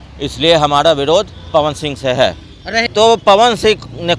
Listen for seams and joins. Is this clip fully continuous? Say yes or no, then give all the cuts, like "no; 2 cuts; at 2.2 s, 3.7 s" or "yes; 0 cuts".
no; 1 cut; at 2.9 s